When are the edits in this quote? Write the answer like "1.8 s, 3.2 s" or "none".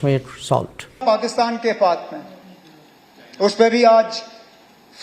1.0 s